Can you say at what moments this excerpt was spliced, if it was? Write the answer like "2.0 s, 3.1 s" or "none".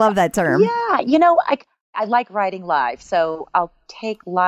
1.8 s